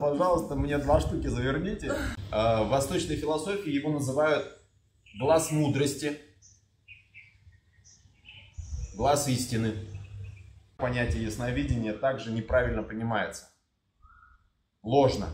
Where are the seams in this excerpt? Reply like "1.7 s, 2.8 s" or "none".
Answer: 2.2 s, 10.8 s